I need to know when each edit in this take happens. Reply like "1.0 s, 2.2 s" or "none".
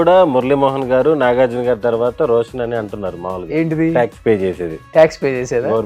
none